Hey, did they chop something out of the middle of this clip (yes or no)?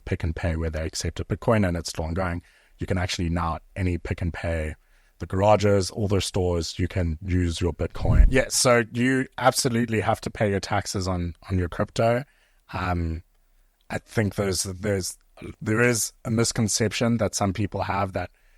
yes